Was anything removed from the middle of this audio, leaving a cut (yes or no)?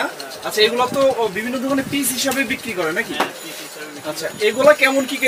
no